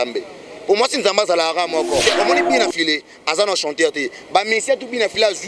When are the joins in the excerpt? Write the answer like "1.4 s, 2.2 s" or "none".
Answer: 2.0 s